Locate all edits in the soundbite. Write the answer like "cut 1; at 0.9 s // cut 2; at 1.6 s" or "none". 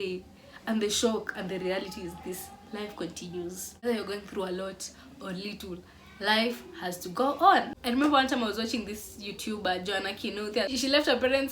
cut 1; at 3.8 s // cut 2; at 7.7 s